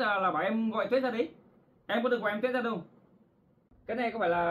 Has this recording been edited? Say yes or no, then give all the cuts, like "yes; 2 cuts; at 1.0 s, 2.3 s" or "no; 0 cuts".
no; 0 cuts